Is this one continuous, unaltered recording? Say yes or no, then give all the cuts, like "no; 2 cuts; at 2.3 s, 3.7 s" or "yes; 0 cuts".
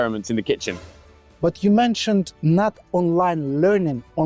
no; 1 cut; at 1.1 s